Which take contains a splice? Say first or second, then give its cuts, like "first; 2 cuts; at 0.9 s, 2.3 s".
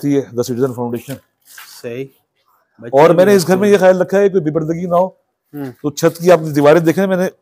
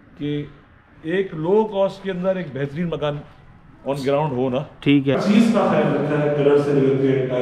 second; 1 cut; at 5.2 s